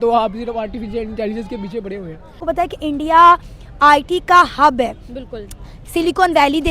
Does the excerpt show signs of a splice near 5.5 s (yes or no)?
no